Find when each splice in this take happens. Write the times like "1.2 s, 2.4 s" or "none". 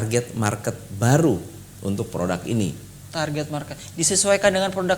none

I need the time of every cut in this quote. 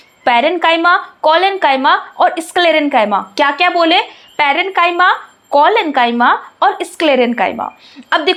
none

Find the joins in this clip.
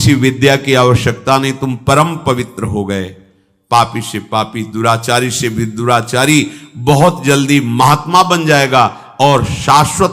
none

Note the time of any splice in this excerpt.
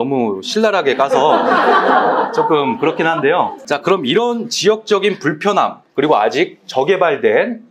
3.6 s

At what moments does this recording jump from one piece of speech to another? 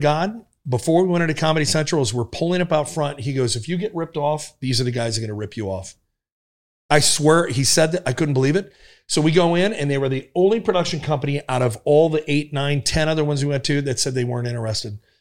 none

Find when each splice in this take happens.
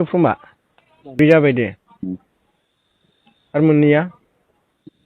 1.2 s

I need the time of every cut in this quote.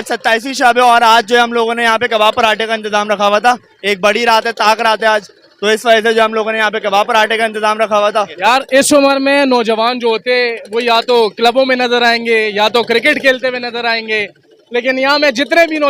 8.3 s

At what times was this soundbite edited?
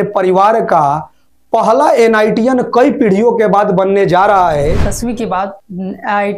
4.8 s

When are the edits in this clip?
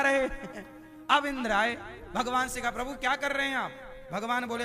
none

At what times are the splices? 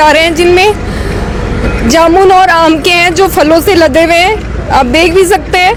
none

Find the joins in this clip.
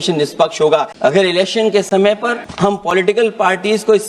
0.9 s, 2.4 s

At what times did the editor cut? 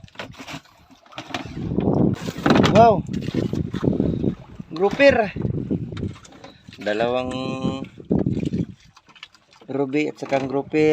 2.2 s

